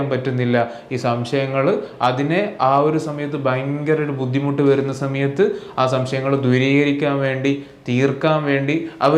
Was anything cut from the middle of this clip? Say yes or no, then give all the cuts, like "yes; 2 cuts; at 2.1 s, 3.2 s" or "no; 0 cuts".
no; 0 cuts